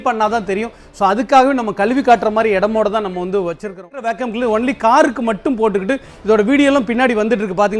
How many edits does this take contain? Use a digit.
1